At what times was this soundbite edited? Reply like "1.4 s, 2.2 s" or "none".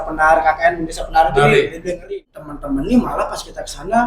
2.1 s